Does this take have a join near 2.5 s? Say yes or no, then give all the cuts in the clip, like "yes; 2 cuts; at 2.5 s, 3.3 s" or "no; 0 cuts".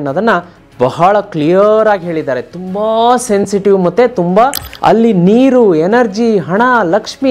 no; 1 cut; at 4.7 s